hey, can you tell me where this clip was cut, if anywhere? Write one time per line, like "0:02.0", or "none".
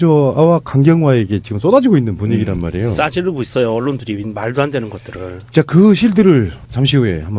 none